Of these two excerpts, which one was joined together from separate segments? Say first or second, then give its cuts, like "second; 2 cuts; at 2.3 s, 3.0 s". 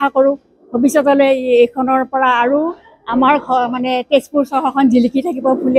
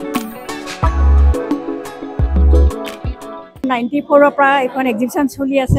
second; 1 cut; at 3.3 s